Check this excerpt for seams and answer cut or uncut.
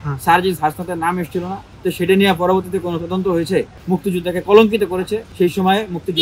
cut